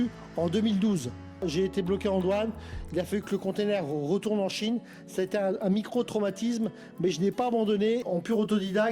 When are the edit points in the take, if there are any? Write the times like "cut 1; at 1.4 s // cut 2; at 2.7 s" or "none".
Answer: cut 1; at 1.4 s // cut 2; at 8.0 s